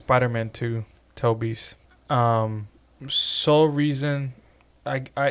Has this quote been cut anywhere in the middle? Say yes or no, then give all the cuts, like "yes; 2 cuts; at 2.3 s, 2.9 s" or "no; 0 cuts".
no; 0 cuts